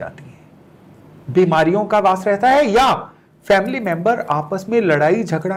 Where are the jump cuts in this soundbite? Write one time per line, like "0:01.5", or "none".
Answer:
none